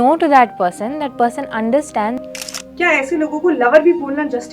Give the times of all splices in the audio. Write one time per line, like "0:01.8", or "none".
0:02.2